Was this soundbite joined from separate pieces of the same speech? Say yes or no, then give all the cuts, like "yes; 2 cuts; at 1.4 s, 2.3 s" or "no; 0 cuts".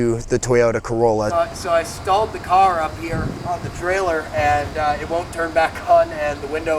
yes; 1 cut; at 1.4 s